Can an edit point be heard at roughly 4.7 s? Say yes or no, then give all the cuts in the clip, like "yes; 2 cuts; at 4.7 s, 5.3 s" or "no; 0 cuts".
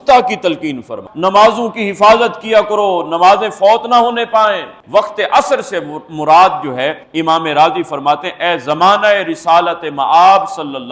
yes; 2 cuts; at 1.0 s, 4.7 s